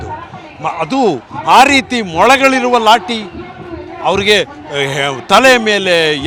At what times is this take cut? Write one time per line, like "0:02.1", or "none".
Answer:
none